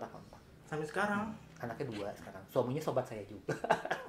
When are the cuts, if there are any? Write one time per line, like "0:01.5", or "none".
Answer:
none